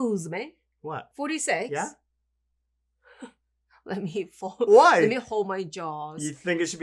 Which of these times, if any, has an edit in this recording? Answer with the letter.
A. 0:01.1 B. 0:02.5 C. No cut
A